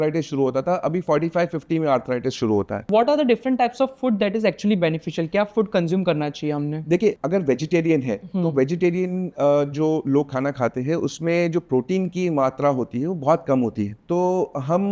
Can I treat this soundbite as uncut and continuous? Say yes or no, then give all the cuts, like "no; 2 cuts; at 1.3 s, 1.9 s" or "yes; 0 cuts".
no; 3 cuts; at 2.9 s, 7.2 s, 14.0 s